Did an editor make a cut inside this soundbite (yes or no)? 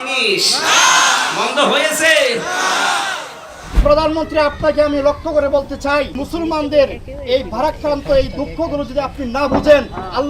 yes